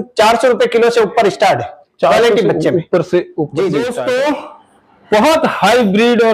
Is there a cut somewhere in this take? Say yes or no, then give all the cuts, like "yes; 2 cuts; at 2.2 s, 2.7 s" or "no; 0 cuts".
yes; 1 cut; at 3.9 s